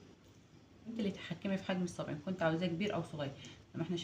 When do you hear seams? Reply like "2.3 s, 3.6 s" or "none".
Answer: 0.9 s